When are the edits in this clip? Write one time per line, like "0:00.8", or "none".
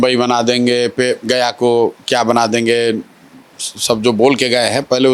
none